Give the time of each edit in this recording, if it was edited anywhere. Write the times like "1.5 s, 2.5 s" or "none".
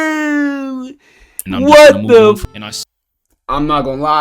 2.5 s